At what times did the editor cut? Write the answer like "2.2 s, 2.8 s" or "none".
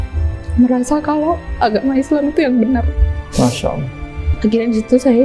4.2 s